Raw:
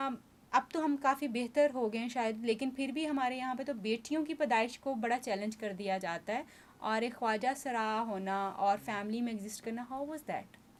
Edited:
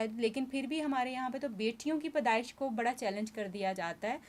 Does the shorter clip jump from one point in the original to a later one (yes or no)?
no